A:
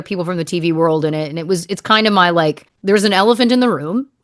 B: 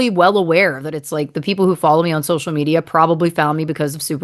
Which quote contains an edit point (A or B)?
A